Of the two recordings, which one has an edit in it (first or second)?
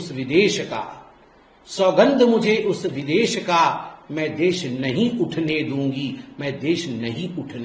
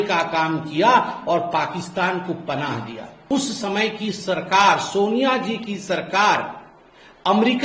second